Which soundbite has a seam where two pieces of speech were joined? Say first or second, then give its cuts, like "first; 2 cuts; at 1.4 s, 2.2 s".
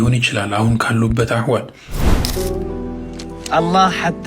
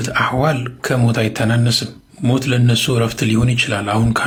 first; 1 cut; at 2.2 s